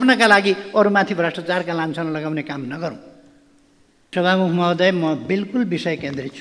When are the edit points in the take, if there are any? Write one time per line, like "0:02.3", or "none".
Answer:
0:04.0